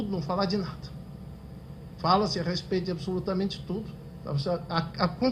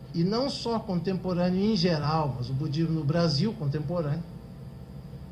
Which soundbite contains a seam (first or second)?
second